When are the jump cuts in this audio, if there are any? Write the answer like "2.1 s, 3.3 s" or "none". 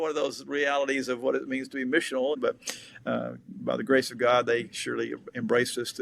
2.4 s